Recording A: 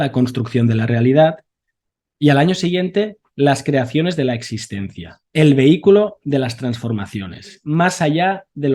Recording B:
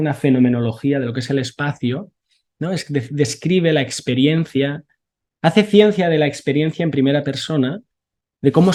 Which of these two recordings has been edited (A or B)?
A